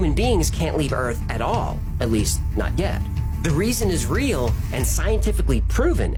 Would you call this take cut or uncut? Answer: uncut